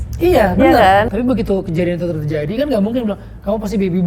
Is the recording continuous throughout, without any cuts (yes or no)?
no